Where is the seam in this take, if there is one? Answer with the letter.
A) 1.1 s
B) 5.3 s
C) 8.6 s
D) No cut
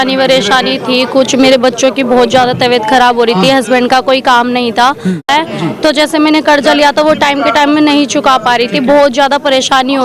B